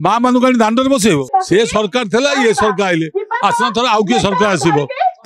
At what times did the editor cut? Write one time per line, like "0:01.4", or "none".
0:01.2